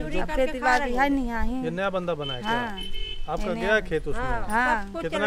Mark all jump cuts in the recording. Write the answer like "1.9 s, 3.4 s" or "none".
none